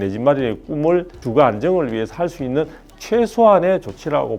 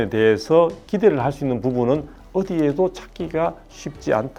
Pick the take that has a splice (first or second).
first